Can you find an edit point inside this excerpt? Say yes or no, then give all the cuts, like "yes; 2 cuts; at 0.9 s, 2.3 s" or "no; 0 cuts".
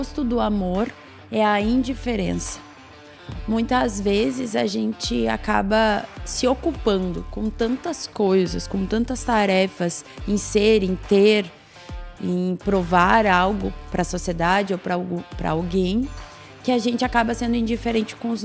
no; 0 cuts